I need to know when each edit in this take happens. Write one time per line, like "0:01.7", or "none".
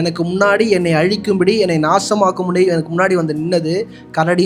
none